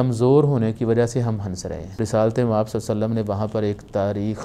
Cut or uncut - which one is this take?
cut